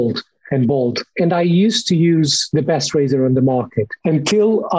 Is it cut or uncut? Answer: cut